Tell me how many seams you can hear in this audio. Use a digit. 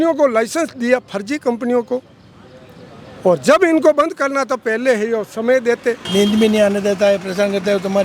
1